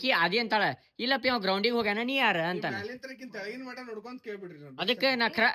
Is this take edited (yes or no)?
no